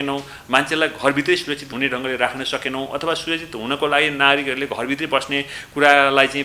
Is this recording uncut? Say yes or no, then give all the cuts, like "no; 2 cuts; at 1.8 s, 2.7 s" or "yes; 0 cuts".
yes; 0 cuts